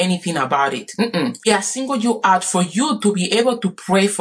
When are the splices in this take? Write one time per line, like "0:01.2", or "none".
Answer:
0:01.4